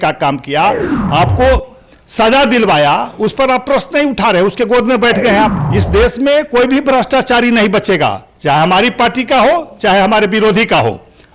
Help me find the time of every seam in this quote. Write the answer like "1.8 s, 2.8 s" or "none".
5.7 s